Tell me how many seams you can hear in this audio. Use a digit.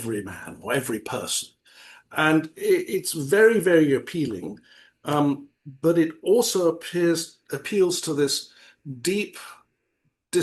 0